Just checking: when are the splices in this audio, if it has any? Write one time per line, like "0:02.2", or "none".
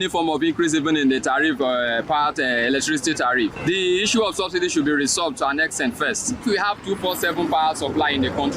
0:03.6
0:06.4